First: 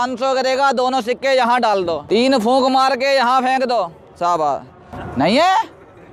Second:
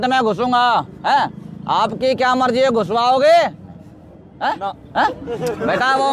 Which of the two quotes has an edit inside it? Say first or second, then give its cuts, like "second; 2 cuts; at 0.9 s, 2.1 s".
first; 2 cuts; at 2.0 s, 5.0 s